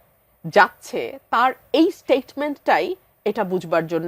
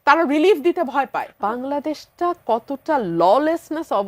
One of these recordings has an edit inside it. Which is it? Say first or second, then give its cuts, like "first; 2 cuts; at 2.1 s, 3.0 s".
second; 1 cut; at 1.3 s